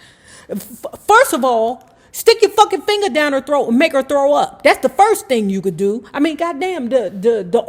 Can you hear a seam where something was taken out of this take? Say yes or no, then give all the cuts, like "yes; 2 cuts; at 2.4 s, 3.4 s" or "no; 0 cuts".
no; 0 cuts